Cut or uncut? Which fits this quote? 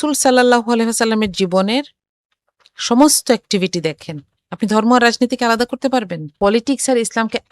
cut